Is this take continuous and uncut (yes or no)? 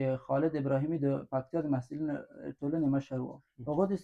yes